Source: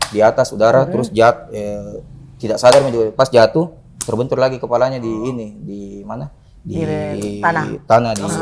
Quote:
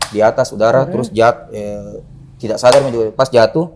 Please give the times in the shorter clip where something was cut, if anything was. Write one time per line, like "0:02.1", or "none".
none